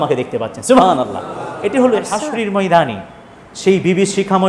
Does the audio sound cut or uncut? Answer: cut